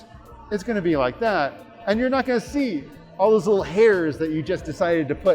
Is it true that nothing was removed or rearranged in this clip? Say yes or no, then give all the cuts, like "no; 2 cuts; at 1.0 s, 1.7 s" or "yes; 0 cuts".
yes; 0 cuts